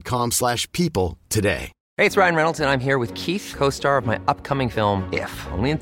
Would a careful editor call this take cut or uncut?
cut